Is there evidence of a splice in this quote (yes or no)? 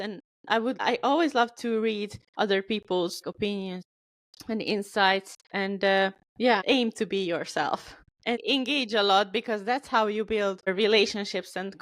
yes